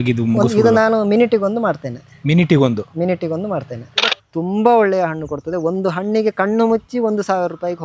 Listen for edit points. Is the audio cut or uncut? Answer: cut